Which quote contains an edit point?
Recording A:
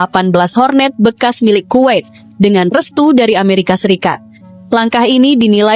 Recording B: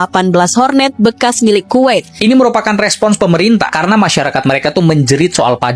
B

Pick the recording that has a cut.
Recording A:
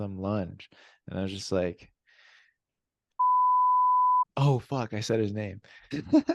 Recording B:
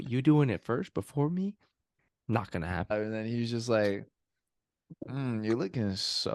B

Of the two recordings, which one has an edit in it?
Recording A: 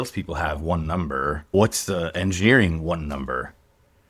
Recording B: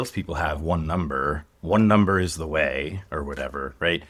A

